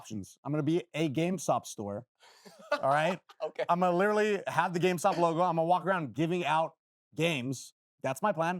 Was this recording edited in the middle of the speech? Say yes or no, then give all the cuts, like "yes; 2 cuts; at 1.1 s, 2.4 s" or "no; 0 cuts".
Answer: no; 0 cuts